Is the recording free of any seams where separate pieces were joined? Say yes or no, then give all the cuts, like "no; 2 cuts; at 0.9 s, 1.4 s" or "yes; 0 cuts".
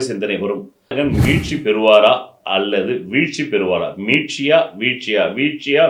no; 1 cut; at 0.9 s